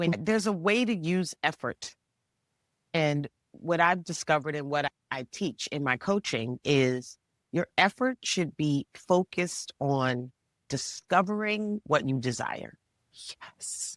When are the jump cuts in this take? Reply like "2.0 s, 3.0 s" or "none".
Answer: 2.9 s